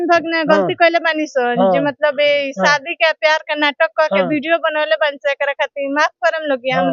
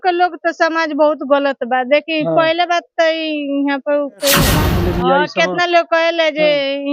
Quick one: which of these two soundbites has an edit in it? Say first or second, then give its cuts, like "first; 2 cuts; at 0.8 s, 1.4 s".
second; 1 cut; at 4.6 s